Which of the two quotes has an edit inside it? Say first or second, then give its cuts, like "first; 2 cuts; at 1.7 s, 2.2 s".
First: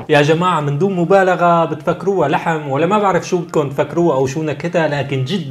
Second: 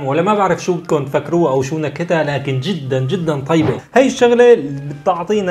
second; 1 cut; at 3.8 s